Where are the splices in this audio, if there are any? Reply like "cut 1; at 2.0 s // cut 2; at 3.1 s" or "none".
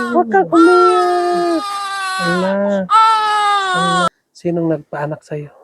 cut 1; at 4.1 s